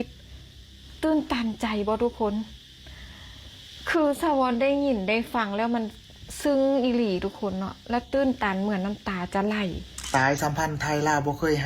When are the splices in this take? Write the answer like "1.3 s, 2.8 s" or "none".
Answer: 9.9 s